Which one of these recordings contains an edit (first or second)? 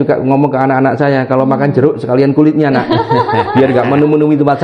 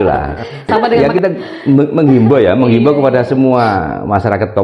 second